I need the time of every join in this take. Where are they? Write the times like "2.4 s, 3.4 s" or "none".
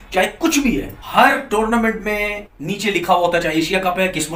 none

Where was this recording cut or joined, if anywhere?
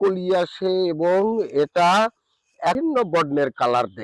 2.8 s

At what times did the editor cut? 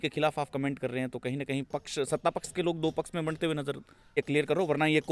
4.2 s

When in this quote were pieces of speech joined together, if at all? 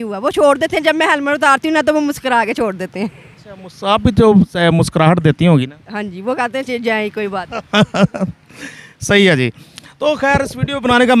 none

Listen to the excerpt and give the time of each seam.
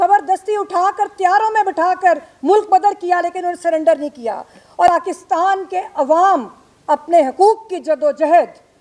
4.9 s

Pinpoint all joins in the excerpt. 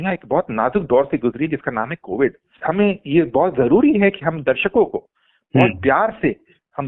2.5 s

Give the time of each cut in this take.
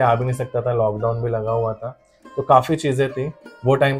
none

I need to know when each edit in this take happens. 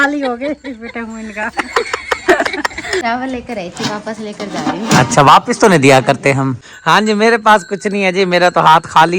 3.0 s, 6.8 s

